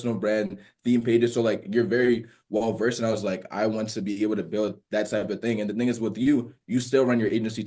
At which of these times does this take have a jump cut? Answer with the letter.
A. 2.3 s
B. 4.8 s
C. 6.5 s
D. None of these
D